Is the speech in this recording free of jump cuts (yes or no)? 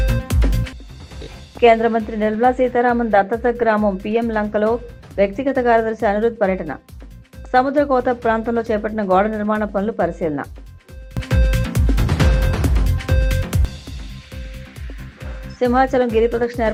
yes